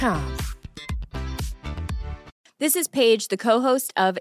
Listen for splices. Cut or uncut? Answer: cut